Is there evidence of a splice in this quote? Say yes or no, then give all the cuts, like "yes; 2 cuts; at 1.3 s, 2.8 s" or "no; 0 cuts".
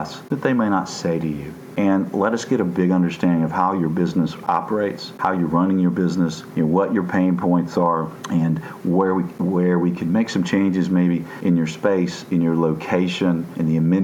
no; 0 cuts